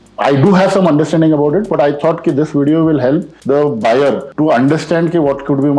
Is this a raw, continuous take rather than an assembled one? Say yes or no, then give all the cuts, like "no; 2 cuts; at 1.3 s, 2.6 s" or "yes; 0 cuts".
no; 2 cuts; at 3.3 s, 4.3 s